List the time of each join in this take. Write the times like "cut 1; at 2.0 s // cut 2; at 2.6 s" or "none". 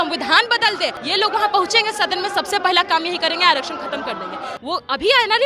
cut 1; at 1.0 s // cut 2; at 4.4 s